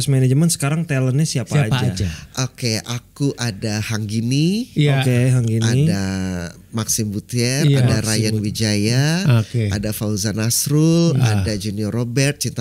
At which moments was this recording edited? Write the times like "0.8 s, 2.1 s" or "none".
none